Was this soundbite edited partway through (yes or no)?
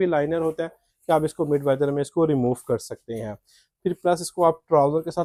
no